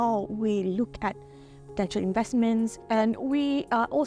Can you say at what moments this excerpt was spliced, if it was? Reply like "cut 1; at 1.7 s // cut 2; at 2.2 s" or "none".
cut 1; at 2.8 s